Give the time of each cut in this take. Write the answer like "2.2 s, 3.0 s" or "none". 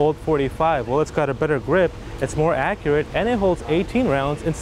none